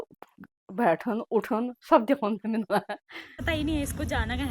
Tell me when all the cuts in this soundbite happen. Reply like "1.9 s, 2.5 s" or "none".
3.4 s